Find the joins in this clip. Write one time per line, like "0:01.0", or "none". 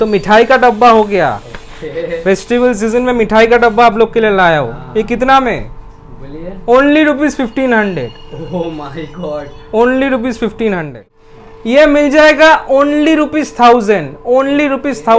0:11.1